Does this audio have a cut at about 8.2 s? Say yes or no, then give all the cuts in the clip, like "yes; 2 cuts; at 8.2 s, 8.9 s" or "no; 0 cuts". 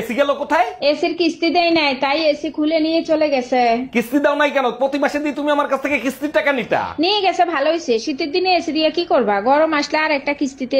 no; 0 cuts